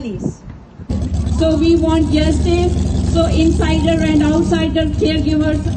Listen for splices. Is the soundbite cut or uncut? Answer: cut